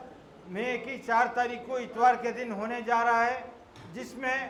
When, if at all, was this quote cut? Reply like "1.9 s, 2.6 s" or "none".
none

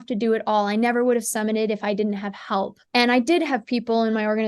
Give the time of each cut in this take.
2.8 s

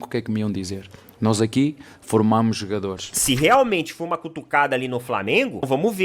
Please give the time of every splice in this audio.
3.1 s

